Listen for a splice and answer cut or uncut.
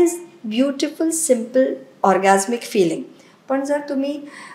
uncut